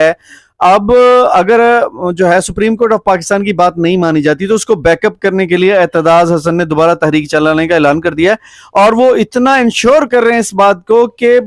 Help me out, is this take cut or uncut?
uncut